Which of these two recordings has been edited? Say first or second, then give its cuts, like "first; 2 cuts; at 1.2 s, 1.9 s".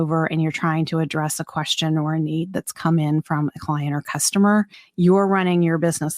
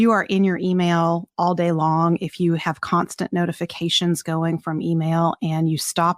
first; 1 cut; at 4.8 s